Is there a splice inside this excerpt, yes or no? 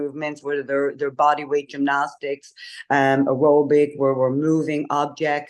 no